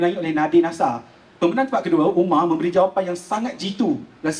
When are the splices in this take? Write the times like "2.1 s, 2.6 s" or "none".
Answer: none